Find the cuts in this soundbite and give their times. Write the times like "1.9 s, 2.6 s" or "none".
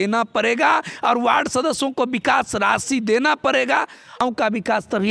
4.2 s